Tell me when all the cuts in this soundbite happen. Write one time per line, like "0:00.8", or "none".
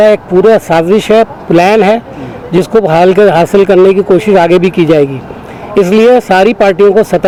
none